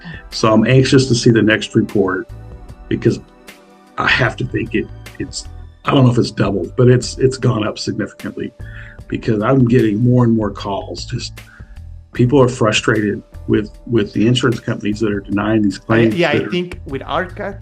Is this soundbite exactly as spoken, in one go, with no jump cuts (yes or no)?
no